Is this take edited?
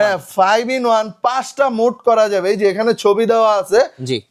no; 0 cuts

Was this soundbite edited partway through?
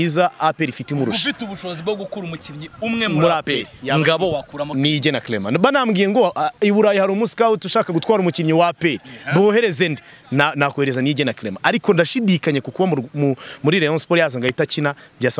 no; 0 cuts

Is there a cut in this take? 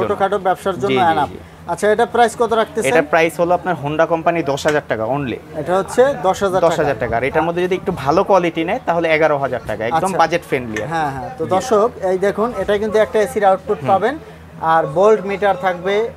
no; 0 cuts

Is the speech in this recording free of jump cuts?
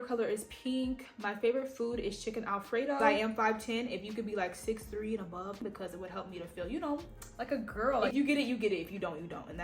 no; 3 cuts; at 3.0 s, 5.6 s, 8.1 s

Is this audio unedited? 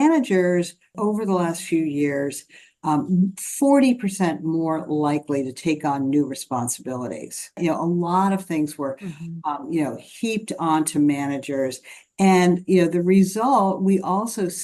no; 2 cuts; at 0.9 s, 7.6 s

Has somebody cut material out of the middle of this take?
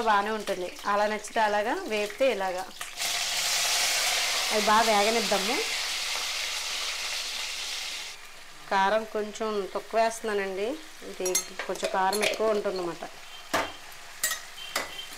yes; 2 cuts; at 3.0 s, 8.1 s

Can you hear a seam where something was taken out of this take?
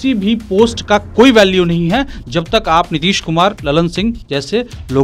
no; 0 cuts

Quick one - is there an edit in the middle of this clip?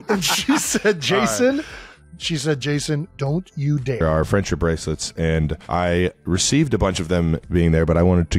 no; 0 cuts

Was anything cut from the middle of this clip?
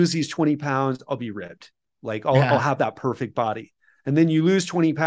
no; 0 cuts

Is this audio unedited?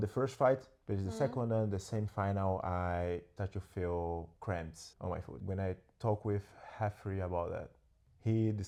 yes; 0 cuts

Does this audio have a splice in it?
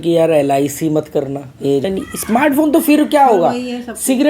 yes; 1 cut; at 1.8 s

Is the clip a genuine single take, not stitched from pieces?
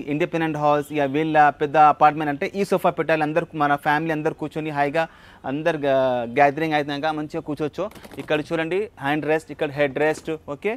yes; 0 cuts

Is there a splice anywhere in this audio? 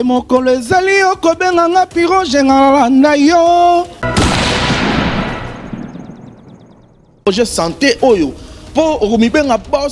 yes; 1 cut; at 3.8 s

